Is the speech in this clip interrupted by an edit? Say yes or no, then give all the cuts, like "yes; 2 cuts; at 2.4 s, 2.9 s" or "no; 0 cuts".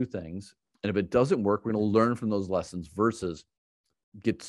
no; 0 cuts